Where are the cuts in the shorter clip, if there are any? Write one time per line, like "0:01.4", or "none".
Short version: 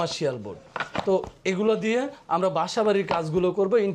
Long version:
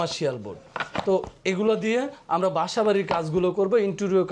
none